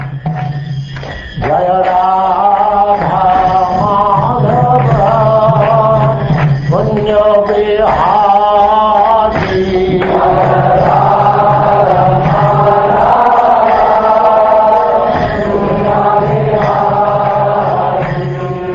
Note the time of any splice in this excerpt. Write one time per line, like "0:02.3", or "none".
none